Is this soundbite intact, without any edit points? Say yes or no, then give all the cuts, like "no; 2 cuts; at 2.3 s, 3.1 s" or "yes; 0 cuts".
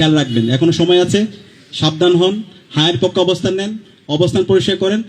yes; 0 cuts